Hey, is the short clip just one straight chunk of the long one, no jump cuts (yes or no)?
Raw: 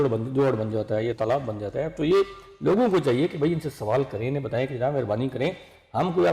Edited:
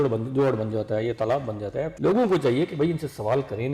no